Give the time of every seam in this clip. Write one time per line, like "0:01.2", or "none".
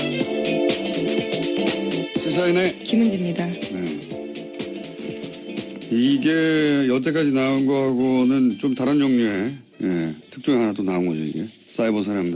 0:04.1